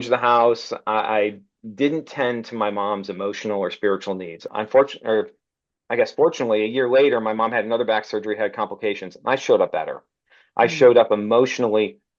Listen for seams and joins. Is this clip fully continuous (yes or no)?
no